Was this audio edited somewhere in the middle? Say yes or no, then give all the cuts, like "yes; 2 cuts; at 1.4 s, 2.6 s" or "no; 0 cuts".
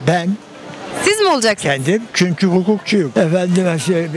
no; 0 cuts